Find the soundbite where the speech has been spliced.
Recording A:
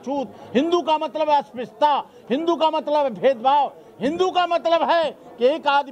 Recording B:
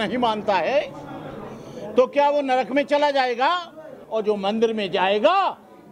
B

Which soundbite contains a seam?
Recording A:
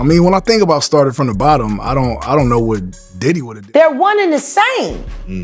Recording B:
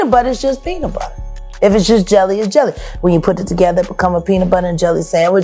A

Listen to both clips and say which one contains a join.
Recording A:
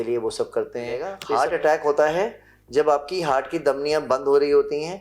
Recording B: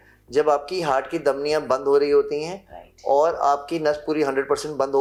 A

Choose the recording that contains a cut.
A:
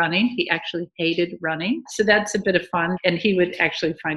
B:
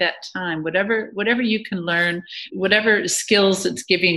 A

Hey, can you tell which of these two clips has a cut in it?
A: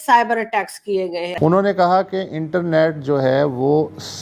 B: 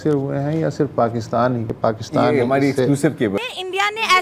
B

